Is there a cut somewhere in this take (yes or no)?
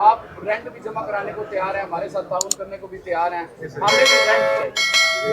no